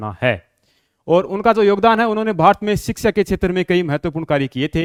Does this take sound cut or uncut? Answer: uncut